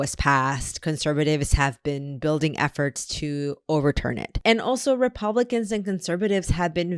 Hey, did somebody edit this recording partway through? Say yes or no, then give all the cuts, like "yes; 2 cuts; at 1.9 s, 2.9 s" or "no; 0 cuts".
yes; 1 cut; at 4.3 s